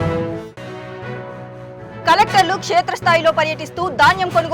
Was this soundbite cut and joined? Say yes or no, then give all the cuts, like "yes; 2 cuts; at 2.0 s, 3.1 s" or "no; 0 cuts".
yes; 1 cut; at 2.0 s